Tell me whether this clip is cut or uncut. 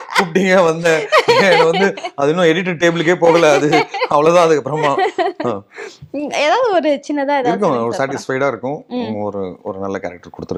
uncut